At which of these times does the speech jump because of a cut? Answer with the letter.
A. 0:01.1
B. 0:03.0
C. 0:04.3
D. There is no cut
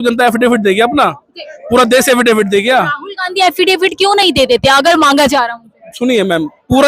D